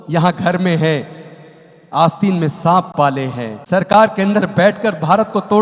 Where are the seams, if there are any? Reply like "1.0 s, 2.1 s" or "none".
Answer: 3.5 s

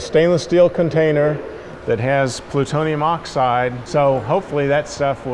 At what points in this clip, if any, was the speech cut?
3.8 s

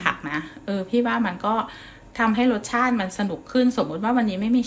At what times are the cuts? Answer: none

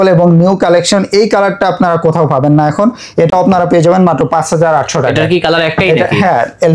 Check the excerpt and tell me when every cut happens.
none

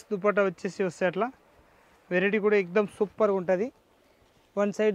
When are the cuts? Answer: none

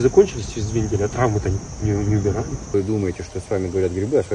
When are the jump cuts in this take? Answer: 2.7 s

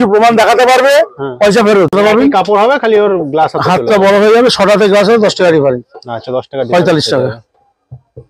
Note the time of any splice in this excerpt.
1.9 s

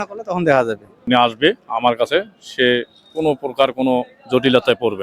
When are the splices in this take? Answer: 0.9 s

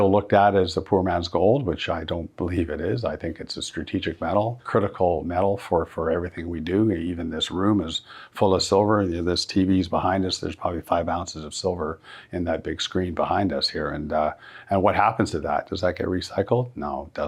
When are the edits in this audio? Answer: 4.6 s

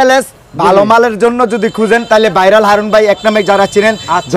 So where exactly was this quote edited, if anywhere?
none

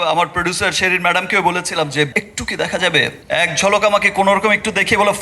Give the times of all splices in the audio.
2.1 s, 3.2 s

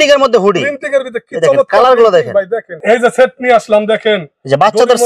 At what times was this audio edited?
2.7 s

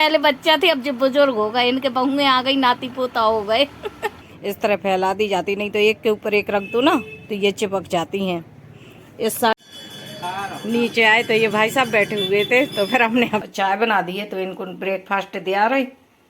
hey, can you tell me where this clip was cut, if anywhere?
4.1 s, 9.5 s, 13.5 s

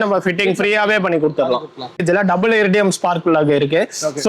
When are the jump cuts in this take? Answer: 2.0 s

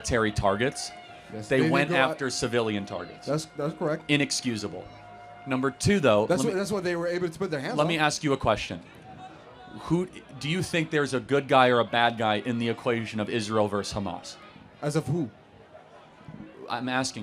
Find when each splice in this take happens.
none

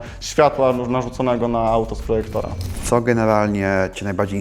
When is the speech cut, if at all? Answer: 2.7 s

